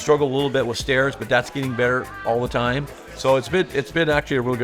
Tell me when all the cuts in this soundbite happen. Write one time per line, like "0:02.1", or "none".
0:02.9